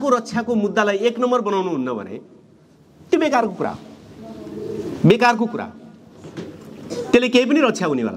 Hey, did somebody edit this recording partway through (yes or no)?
no